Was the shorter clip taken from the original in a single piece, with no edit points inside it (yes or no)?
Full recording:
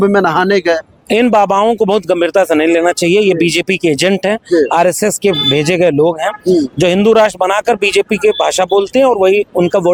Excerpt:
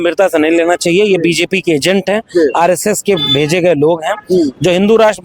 yes